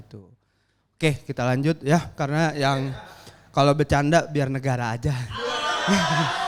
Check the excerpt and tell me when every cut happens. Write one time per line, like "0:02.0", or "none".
none